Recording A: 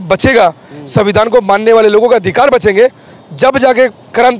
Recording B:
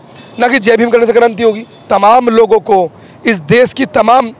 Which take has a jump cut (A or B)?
B